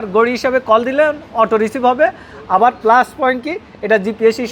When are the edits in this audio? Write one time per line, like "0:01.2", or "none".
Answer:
none